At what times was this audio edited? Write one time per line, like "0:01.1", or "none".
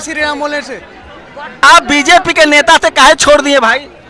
0:01.6